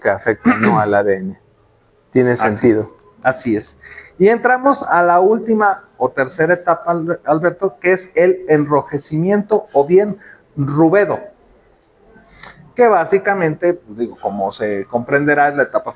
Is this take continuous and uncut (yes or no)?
yes